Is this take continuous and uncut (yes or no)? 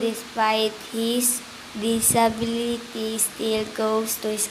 no